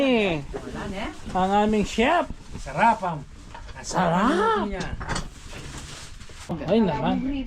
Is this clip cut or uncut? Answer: cut